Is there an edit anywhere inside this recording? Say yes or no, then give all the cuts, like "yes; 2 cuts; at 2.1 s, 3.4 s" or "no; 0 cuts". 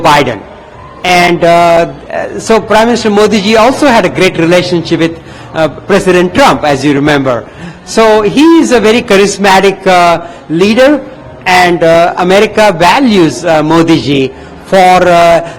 no; 0 cuts